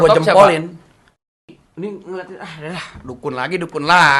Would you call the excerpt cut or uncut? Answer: cut